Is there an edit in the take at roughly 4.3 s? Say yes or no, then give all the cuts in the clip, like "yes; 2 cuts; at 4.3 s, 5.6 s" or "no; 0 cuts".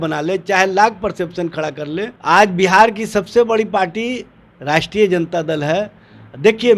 no; 1 cut; at 2.1 s